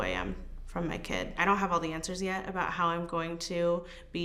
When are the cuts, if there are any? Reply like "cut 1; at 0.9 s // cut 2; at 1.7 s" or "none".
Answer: none